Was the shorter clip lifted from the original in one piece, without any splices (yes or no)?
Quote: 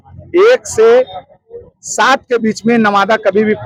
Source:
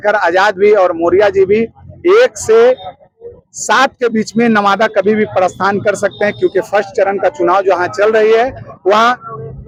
yes